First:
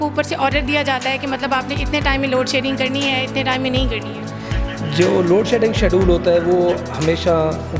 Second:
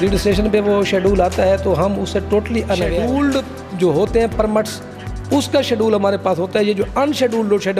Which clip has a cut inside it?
second; 1 cut; at 2.9 s

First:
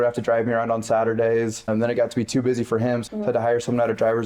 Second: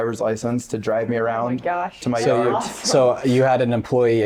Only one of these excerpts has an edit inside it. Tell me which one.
first; 2 cuts; at 1.7 s, 3.0 s

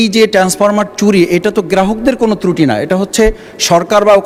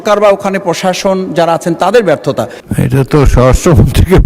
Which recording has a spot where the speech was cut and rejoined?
second; 1 cut; at 2.6 s

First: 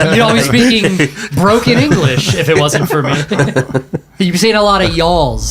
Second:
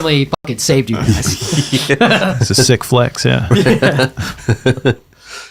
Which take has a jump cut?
first; 1 cut; at 4.1 s

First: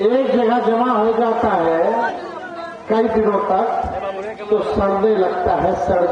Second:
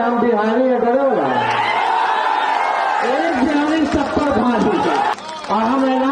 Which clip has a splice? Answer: second; 1 cut; at 5.1 s

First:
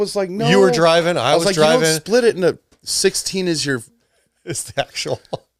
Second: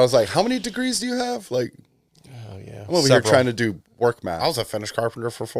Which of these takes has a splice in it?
second; 1 cut; at 4.3 s

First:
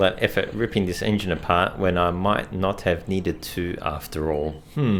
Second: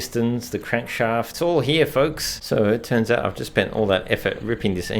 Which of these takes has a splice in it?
second; 2 cuts; at 1.3 s, 2.4 s

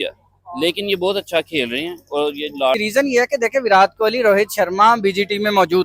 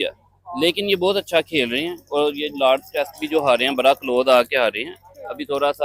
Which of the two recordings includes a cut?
first; 1 cut; at 2.8 s

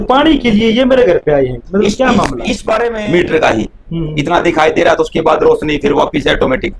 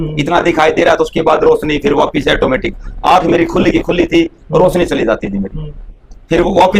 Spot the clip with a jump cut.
first; 1 cut; at 2.9 s

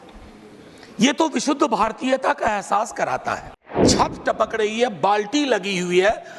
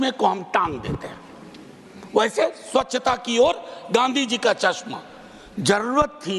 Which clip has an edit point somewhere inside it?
first; 1 cut; at 3.9 s

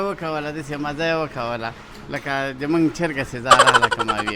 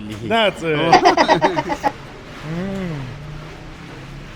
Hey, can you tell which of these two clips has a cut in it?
second; 1 cut; at 1.9 s

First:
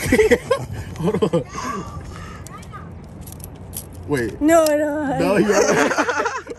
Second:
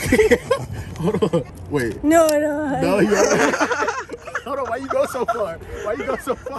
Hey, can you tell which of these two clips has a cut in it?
second; 1 cut; at 1.5 s

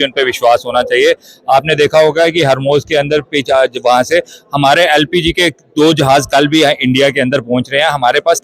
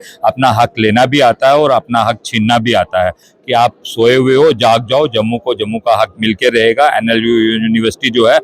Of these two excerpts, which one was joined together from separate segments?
second; 1 cut; at 3.3 s

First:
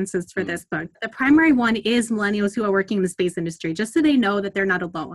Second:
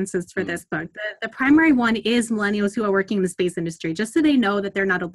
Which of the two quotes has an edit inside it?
first; 1 cut; at 1.0 s

